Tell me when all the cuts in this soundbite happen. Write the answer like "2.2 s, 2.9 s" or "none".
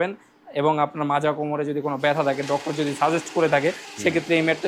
none